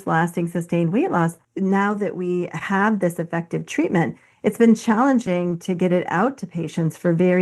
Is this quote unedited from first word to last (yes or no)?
no